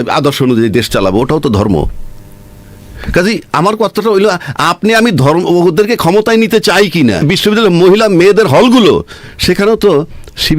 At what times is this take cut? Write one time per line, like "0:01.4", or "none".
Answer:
0:07.2